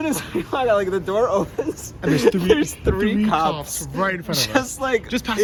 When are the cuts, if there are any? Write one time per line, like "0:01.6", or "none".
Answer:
none